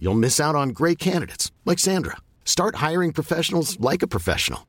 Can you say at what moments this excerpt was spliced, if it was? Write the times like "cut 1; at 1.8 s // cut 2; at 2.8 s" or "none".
none